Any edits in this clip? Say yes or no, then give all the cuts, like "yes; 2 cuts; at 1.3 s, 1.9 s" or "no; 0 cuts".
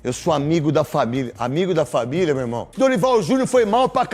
yes; 1 cut; at 2.7 s